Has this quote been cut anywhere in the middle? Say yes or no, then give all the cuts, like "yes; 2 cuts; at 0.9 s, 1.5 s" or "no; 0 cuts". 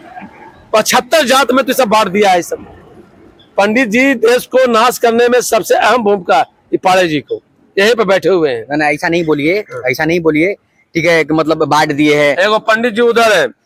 no; 0 cuts